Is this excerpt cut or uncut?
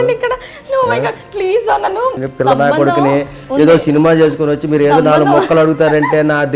cut